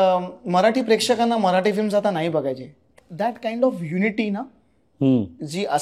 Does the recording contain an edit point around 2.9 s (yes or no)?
yes